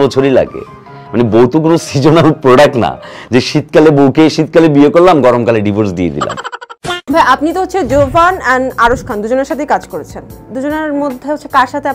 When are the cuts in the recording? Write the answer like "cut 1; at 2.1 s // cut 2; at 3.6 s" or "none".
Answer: none